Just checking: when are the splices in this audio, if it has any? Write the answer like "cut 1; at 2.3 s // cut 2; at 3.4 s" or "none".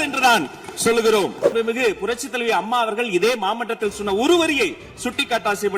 cut 1; at 1.5 s